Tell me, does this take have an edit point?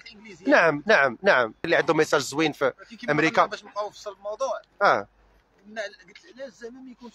yes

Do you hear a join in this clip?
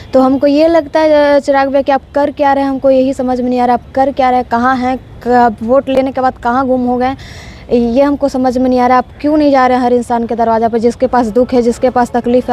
no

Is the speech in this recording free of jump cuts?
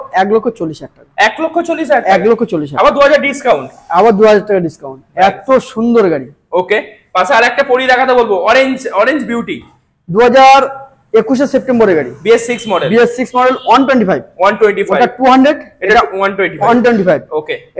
yes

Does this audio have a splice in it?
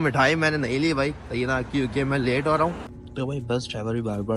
yes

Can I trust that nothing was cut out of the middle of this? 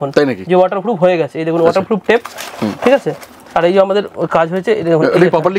yes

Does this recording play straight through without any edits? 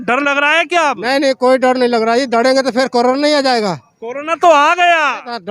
yes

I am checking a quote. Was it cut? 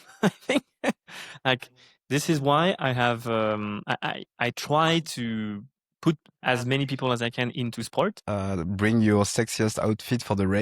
yes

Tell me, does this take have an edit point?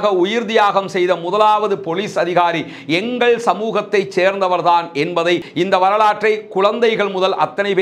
yes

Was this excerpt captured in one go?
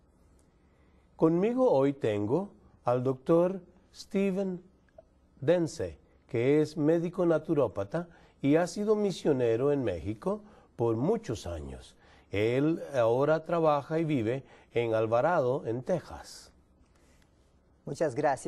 yes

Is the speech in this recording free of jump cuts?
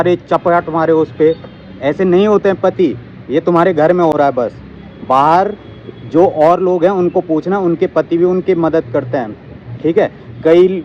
yes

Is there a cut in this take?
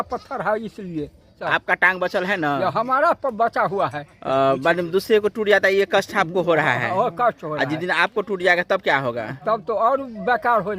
yes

